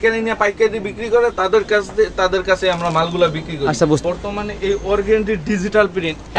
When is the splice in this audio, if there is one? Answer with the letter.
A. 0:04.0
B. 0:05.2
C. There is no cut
A